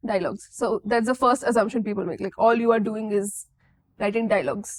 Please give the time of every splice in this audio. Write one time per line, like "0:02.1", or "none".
none